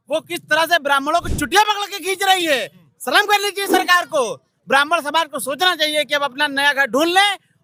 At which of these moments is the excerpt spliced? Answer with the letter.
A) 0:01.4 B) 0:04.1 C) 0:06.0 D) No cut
D